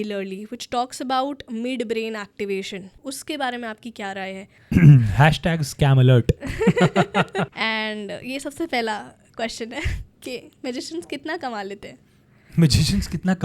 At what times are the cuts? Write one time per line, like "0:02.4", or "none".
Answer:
0:03.0
0:04.5
0:07.5

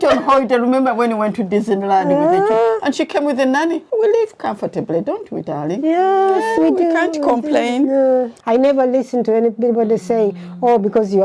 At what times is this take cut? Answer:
0:03.8
0:08.4

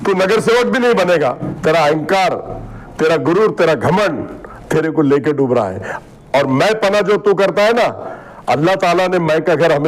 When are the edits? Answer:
0:01.5

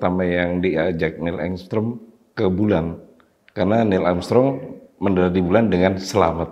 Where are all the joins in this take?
none

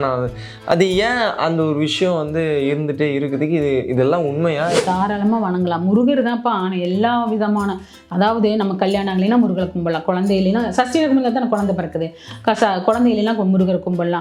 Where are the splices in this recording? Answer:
0:04.8

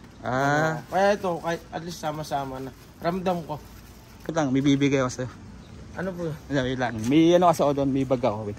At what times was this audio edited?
0:04.3

